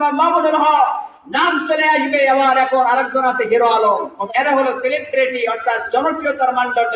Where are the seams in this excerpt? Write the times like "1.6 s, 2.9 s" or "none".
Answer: none